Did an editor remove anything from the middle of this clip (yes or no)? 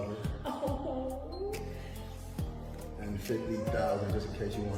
no